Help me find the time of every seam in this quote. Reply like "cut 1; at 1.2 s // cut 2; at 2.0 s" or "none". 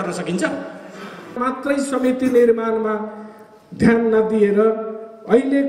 cut 1; at 1.4 s